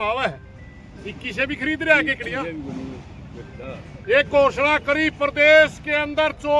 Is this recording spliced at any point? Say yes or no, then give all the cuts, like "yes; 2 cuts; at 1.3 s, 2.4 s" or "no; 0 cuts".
no; 0 cuts